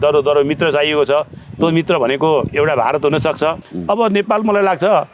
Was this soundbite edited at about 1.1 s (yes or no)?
no